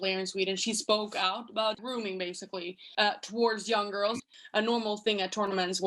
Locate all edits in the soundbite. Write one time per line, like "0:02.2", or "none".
0:02.4
0:04.2

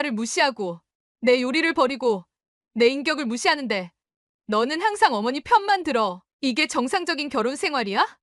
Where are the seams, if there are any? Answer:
none

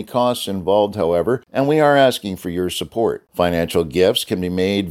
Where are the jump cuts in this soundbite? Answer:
0:01.5

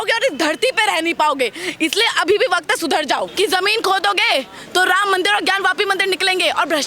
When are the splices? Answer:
0:03.3

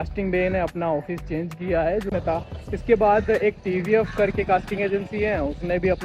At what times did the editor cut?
0:02.1

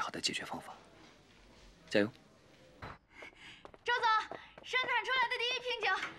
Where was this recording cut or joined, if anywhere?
0:02.8

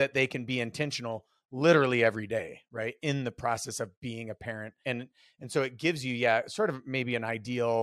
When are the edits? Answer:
0:04.8

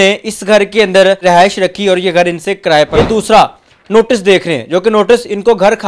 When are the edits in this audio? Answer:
0:01.2
0:03.0

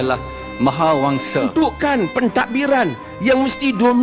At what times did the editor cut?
0:01.5

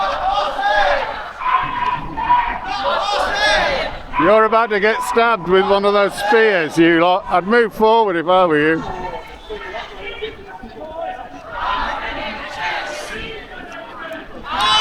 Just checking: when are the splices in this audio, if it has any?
none

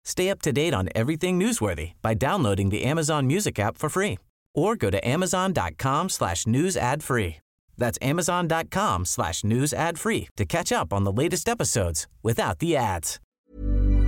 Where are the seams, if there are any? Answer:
0:13.1

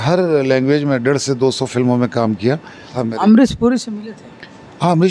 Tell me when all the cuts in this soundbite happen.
0:03.0

